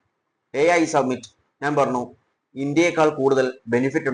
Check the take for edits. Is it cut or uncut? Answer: uncut